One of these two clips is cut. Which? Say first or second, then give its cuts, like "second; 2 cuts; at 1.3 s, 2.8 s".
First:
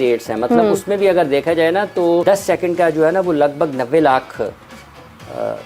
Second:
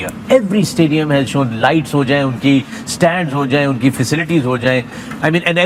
first; 1 cut; at 2.2 s